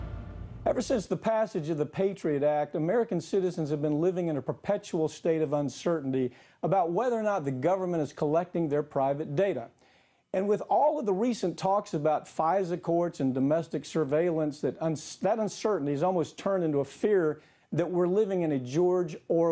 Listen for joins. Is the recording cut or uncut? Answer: cut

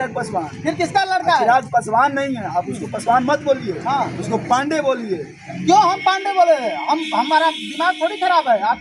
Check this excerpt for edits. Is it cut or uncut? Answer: uncut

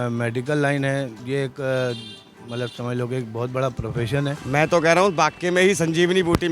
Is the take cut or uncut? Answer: cut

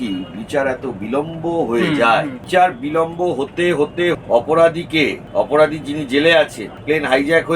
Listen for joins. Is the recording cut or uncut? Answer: cut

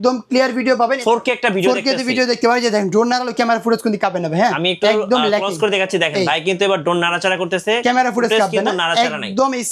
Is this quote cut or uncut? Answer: cut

